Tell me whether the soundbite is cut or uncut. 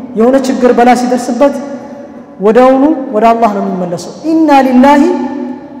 uncut